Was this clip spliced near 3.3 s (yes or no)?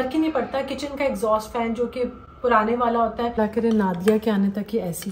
yes